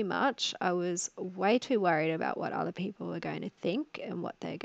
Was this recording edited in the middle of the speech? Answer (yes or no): no